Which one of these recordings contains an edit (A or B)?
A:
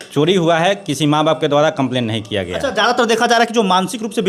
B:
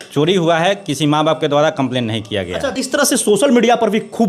B